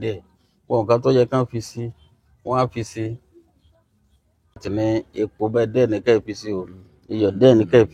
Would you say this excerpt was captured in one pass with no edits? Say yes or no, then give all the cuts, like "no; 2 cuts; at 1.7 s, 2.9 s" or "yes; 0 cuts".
no; 1 cut; at 4.6 s